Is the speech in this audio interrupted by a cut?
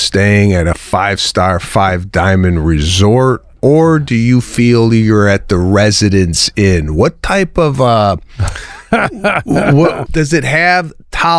yes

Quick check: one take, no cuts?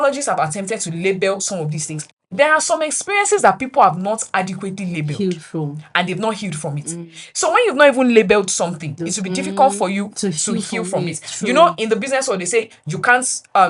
no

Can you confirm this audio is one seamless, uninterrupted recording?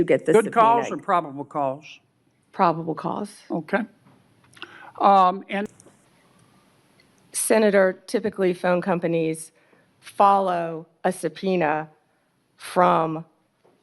no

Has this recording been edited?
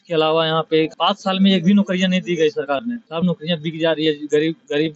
no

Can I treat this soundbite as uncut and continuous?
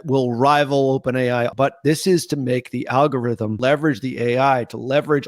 no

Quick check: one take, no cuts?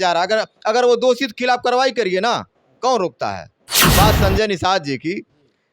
no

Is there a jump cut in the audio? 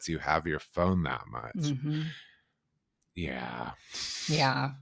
no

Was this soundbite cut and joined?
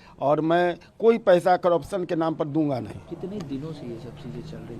no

